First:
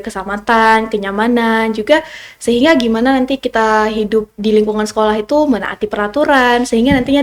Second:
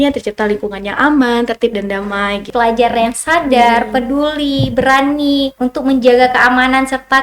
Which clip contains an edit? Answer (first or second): second